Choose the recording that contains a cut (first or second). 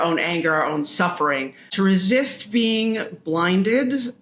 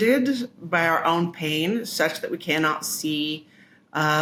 first